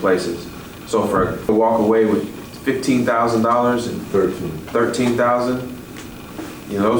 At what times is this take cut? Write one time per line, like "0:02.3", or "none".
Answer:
0:01.5

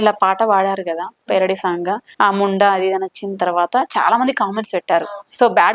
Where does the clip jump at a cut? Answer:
none

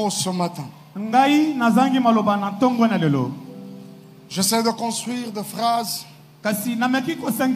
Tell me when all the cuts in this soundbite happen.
none

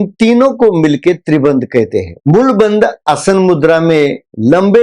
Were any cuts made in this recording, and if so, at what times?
0:02.1

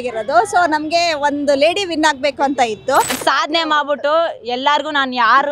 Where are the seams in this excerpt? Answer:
0:03.2

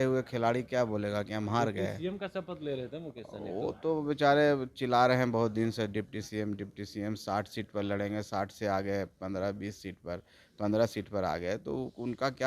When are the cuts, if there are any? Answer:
none

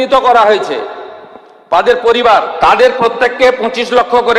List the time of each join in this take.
0:02.5

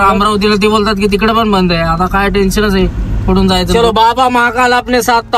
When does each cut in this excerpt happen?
0:03.7

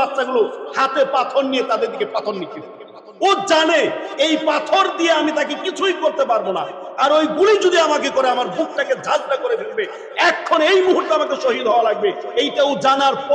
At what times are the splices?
none

